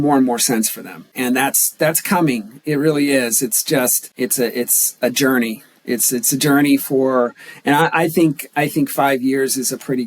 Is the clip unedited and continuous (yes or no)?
no